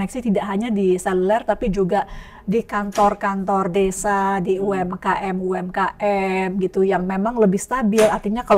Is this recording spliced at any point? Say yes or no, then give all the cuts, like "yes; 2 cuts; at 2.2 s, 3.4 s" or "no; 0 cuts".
no; 0 cuts